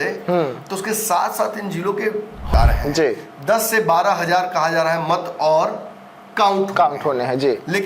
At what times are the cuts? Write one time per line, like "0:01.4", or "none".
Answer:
0:02.5